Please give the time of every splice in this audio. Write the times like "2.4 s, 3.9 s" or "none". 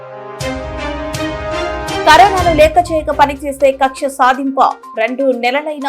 2.0 s

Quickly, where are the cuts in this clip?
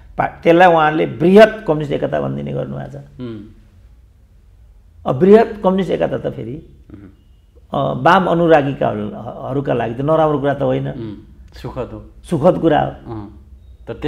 none

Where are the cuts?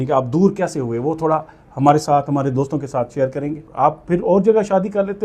3.7 s

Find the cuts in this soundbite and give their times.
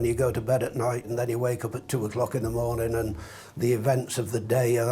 1.1 s

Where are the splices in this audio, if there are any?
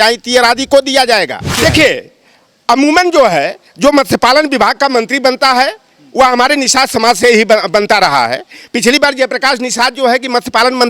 1.5 s

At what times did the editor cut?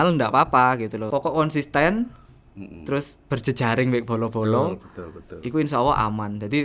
1.0 s

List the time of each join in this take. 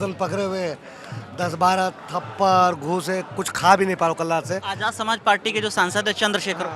none

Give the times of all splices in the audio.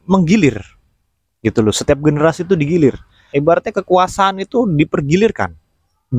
3.2 s

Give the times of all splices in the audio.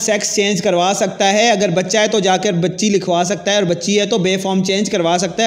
none

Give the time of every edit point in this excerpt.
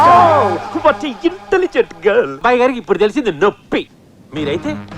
2.4 s

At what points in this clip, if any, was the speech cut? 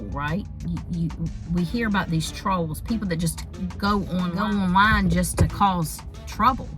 4.3 s

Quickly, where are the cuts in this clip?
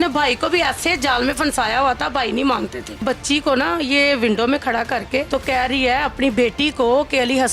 3.0 s, 5.3 s

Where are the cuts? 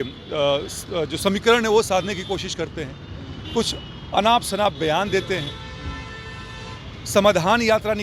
none

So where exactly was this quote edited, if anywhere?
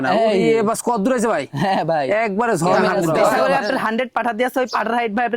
3.4 s

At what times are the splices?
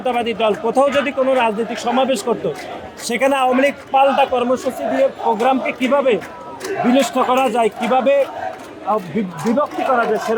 none

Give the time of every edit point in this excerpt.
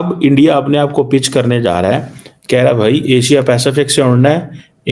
none

